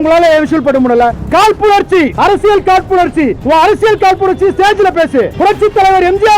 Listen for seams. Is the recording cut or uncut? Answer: cut